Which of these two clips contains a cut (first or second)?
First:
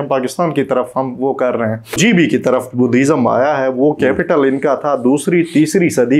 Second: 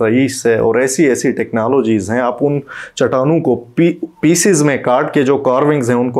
first